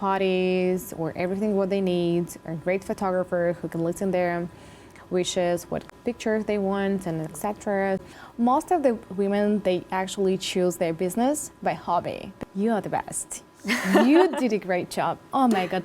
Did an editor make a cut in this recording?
yes; 3 cuts; at 5.9 s, 8.0 s, 12.3 s

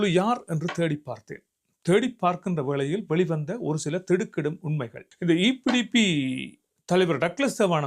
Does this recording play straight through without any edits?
no; 1 cut; at 5.0 s

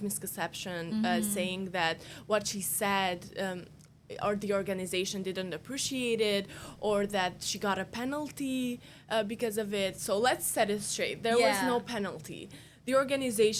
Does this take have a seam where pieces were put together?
no; 0 cuts

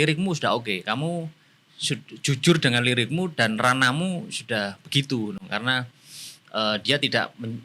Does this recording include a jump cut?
no; 0 cuts

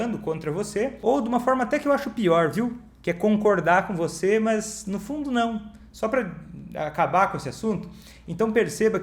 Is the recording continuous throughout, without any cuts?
no; 1 cut; at 1.0 s

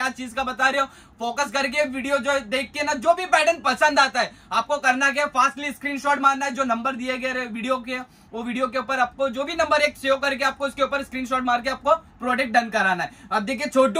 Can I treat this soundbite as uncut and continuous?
yes; 0 cuts

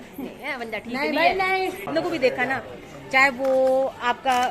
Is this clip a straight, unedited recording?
no; 1 cut; at 1.8 s

